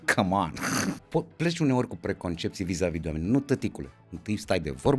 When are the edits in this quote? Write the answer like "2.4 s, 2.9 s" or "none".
1.0 s